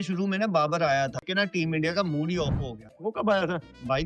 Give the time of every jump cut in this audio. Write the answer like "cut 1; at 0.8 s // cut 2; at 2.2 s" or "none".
cut 1; at 1.2 s // cut 2; at 2.9 s